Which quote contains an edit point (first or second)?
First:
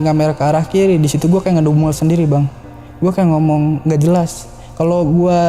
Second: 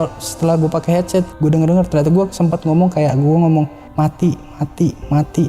second